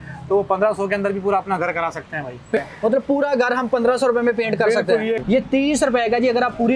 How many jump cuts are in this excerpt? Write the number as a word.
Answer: two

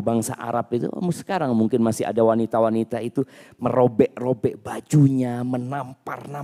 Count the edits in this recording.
zero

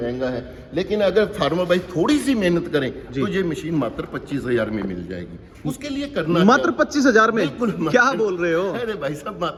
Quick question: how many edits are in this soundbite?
zero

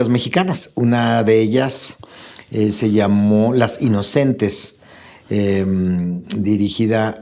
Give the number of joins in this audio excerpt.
zero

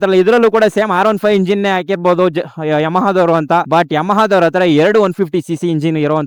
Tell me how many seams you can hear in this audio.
zero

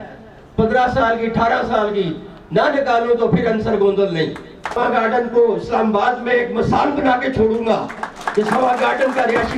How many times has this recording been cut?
one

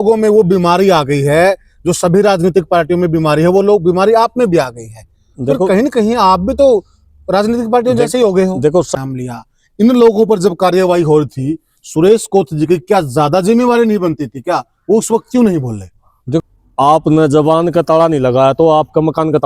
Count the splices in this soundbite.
two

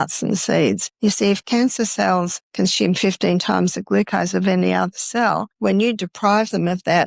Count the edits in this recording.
three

